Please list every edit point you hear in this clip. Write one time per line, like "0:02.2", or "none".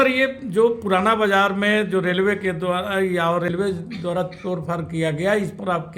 0:03.5